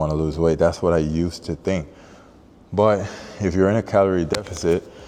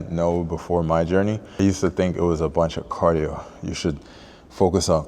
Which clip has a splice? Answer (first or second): second